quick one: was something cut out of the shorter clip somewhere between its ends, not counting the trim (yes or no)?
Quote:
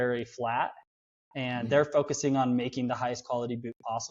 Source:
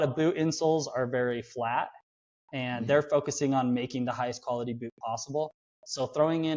no